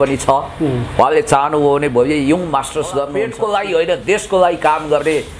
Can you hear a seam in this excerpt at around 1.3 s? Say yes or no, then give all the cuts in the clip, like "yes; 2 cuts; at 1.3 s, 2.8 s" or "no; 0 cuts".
no; 1 cut; at 3.2 s